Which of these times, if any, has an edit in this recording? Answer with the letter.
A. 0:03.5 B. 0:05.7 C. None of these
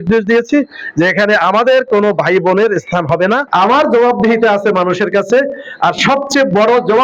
A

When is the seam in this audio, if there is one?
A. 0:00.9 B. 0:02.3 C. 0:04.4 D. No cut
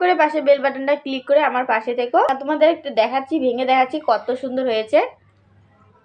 B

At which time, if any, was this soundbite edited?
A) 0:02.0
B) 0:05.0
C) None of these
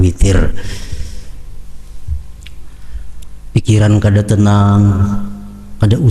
C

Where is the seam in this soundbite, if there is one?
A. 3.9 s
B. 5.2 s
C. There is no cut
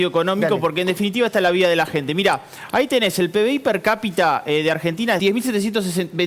B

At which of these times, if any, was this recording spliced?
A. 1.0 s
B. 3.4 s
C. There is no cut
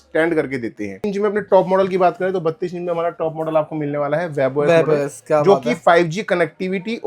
A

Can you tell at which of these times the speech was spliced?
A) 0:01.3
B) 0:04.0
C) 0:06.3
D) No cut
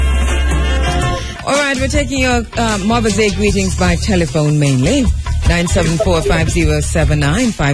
A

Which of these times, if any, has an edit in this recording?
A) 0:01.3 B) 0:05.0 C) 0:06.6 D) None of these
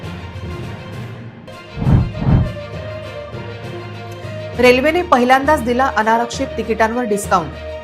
A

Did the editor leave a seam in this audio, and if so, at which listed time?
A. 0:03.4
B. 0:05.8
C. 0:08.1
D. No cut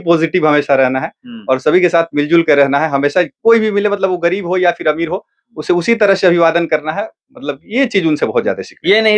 D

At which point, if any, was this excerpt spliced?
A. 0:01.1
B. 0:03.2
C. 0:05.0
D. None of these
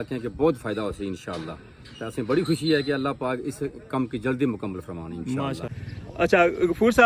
D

